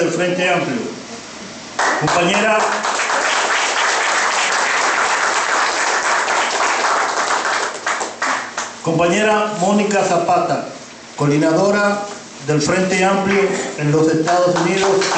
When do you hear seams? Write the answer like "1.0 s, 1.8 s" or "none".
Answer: none